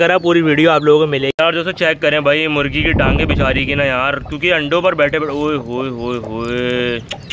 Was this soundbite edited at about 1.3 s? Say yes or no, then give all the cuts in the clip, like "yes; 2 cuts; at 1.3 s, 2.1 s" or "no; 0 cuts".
yes; 1 cut; at 1.3 s